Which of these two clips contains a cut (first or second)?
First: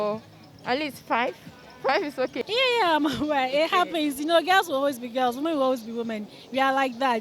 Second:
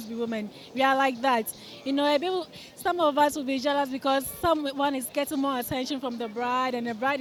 first